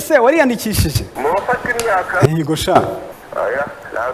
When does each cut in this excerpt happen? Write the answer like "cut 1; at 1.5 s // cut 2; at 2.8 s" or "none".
cut 1; at 1.1 s // cut 2; at 3.2 s